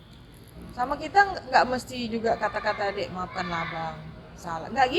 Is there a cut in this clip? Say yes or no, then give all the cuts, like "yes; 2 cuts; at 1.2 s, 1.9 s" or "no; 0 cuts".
no; 0 cuts